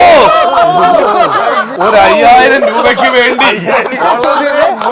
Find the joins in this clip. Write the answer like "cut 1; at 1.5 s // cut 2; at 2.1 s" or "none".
cut 1; at 1.7 s // cut 2; at 3.9 s